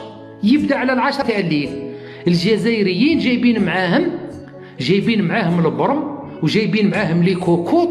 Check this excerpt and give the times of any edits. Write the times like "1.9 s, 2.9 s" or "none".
1.2 s